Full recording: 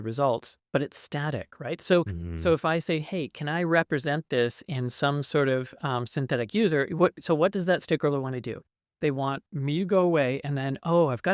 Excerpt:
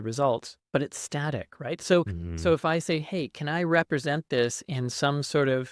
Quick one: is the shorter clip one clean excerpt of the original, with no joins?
yes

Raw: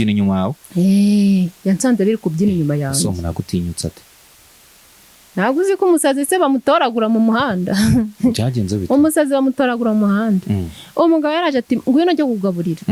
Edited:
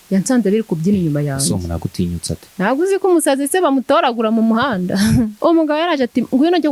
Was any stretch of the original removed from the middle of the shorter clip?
yes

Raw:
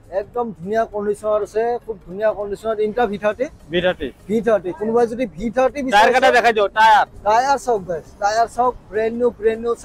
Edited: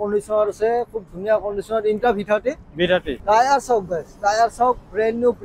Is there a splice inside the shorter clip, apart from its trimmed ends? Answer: yes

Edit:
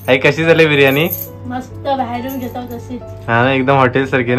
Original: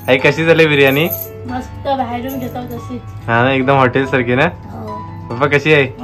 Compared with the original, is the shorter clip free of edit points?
yes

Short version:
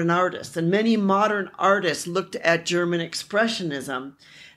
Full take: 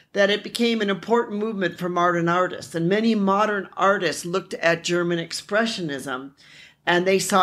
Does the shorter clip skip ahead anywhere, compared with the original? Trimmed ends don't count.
no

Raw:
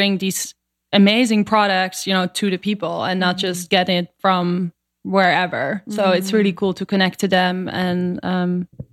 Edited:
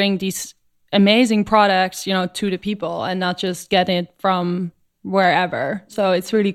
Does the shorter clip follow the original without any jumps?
yes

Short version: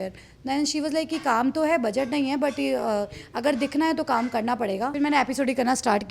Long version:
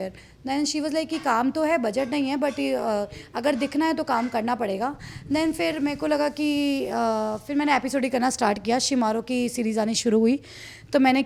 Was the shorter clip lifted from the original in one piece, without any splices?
no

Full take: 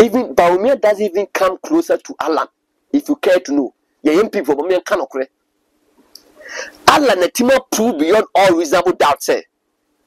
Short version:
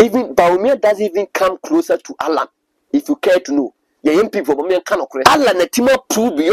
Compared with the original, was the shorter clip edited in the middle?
yes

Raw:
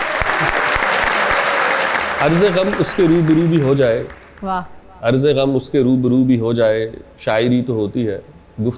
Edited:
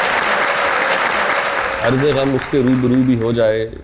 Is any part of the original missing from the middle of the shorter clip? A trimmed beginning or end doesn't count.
yes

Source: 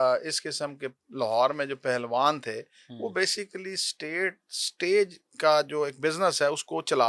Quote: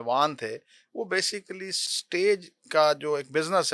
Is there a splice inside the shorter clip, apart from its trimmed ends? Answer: yes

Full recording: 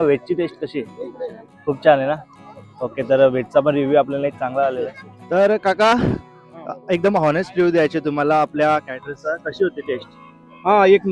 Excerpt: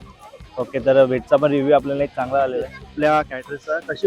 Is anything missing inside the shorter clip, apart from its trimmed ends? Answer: yes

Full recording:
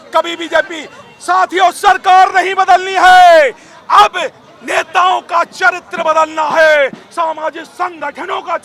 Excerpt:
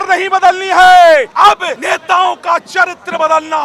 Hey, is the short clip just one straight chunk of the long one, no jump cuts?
no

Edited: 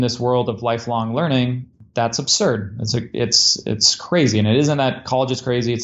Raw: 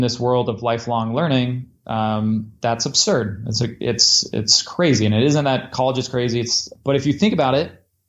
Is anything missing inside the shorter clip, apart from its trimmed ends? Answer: yes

